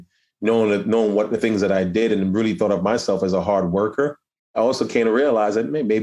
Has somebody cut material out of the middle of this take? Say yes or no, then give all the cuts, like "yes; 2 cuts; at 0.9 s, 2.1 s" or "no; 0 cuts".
yes; 1 cut; at 4.5 s